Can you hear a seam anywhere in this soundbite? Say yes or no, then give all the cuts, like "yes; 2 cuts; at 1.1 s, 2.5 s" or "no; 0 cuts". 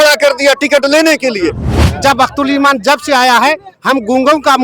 yes; 1 cut; at 1.7 s